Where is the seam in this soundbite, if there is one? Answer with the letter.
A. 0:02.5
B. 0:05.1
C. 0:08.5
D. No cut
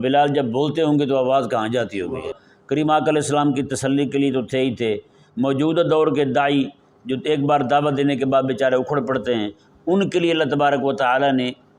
A